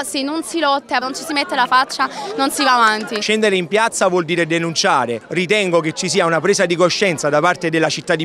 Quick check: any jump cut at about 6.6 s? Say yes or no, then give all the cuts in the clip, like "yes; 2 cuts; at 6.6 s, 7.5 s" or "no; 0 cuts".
no; 3 cuts; at 1.0 s, 3.2 s, 5.1 s